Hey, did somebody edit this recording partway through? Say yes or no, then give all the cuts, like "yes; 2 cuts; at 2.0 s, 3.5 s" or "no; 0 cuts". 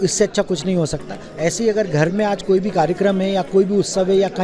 yes; 1 cut; at 1.2 s